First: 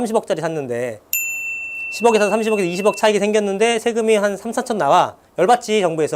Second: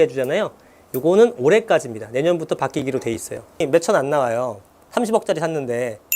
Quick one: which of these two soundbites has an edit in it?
second; 1 cut; at 3.6 s

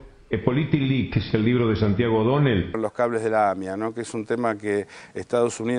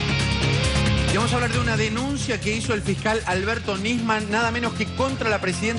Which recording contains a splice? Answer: first; 1 cut; at 2.8 s

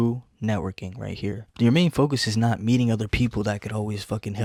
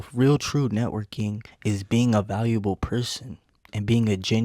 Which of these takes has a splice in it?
second; 1 cut; at 1.5 s

